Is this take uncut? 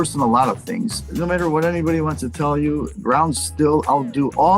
no; 1 cut; at 1.0 s

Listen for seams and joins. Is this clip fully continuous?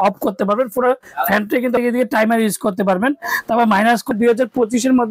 no; 2 cuts; at 1.8 s, 4.1 s

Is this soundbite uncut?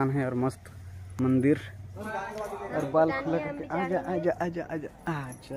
no; 1 cut; at 2.1 s

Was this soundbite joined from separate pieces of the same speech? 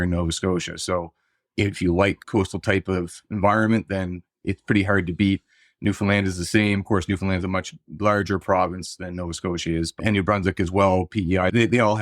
yes; 1 cut; at 2.2 s

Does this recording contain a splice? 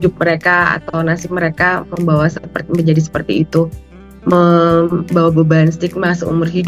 no; 0 cuts

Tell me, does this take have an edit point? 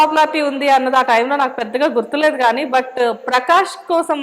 no; 0 cuts

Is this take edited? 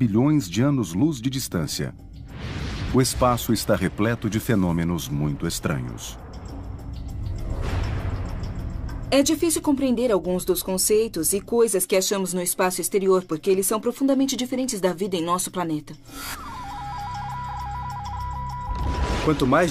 yes; 1 cut; at 8.3 s

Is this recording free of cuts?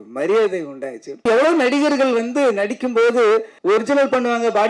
no; 2 cuts; at 1.2 s, 3.5 s

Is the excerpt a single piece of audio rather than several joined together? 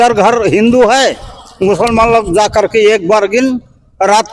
yes; 0 cuts

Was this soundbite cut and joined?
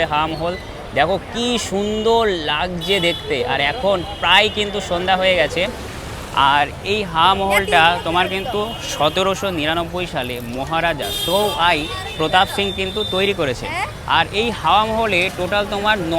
no; 0 cuts

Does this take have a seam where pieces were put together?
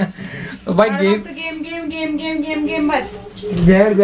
no; 0 cuts

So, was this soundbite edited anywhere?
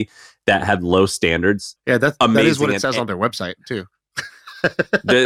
yes; 1 cut; at 1.7 s

